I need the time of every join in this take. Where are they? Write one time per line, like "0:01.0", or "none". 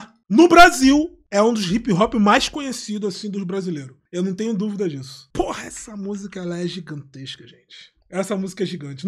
none